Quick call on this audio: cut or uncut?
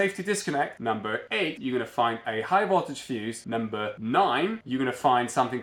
uncut